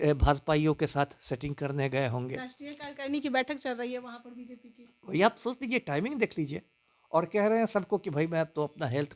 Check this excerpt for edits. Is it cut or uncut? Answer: uncut